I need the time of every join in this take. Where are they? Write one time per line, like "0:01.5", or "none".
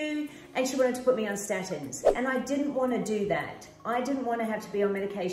0:02.2